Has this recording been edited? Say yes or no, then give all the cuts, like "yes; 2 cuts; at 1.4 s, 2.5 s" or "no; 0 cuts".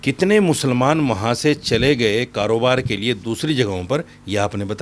no; 0 cuts